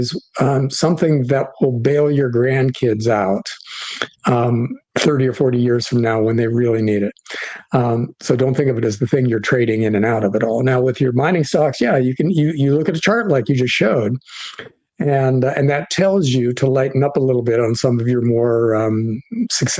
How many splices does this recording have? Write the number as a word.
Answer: one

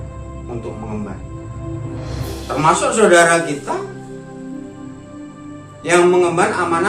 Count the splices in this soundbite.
two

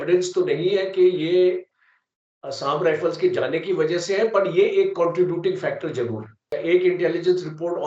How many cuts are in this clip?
one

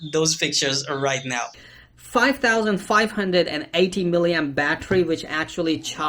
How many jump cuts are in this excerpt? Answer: one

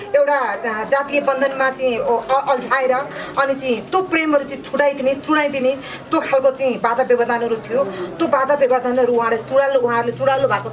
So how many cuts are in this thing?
zero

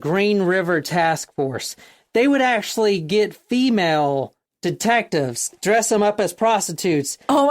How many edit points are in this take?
two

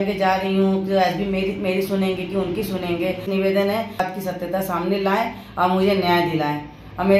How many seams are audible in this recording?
two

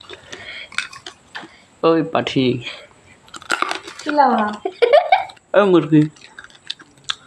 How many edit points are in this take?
one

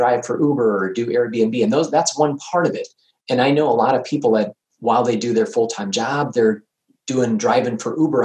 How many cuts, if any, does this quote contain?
one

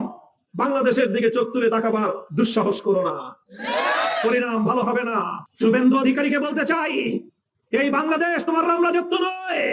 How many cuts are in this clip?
zero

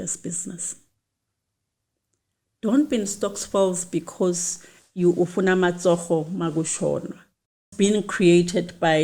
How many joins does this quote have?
one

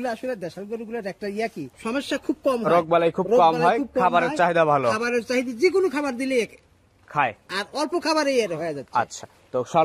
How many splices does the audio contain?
one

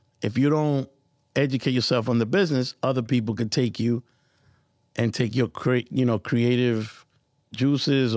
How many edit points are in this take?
zero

